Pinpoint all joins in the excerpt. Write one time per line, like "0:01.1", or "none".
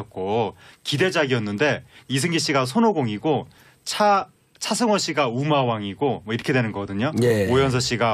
0:05.4